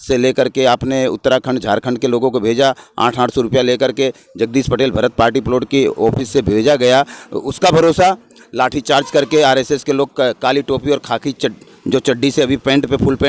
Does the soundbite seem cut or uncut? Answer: uncut